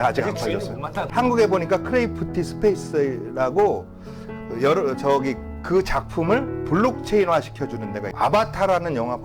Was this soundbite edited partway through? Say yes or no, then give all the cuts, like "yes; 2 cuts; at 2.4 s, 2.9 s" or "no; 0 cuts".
yes; 2 cuts; at 1.1 s, 8.1 s